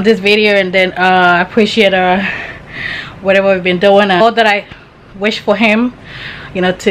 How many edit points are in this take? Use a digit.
1